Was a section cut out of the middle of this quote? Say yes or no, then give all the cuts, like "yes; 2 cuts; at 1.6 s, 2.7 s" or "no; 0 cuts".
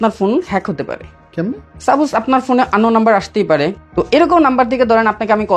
yes; 2 cuts; at 1.7 s, 3.8 s